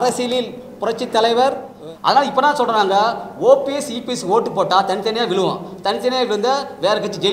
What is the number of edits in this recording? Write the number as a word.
one